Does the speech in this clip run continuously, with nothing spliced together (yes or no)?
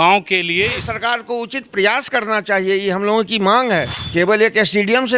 no